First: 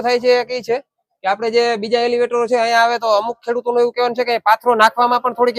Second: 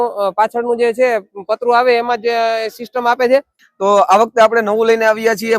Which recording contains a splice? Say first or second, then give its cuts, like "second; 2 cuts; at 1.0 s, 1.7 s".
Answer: second; 1 cut; at 3.6 s